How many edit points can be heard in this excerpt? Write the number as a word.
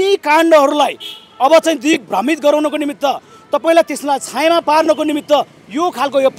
zero